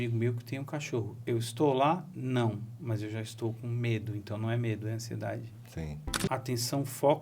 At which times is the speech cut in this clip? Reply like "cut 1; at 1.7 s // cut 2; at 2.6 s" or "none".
cut 1; at 6.2 s